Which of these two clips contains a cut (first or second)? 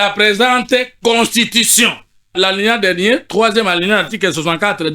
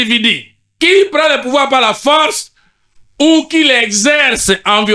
first